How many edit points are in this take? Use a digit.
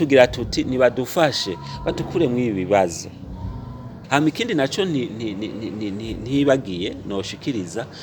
1